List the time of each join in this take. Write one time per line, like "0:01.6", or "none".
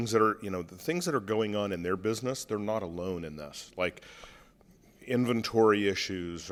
none